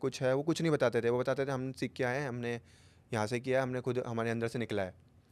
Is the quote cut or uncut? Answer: uncut